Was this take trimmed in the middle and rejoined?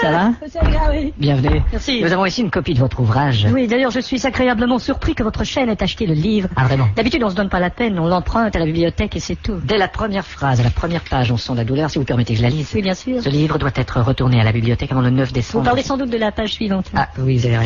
yes; 1 cut; at 9.9 s

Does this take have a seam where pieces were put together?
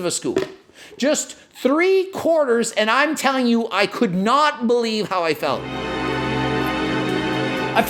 yes; 1 cut; at 5.8 s

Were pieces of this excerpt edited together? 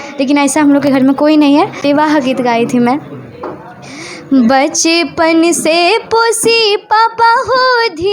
yes; 1 cut; at 1.8 s

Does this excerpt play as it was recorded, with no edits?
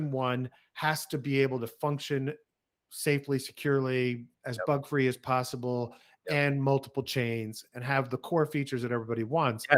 yes; 0 cuts

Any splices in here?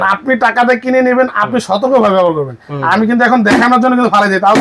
no; 0 cuts

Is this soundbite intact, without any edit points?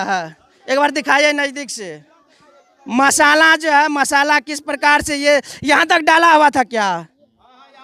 yes; 0 cuts

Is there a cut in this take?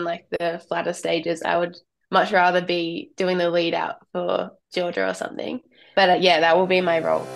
yes; 1 cut; at 5.8 s

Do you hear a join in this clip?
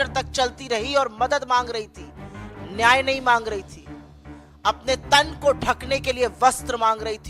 no; 0 cuts

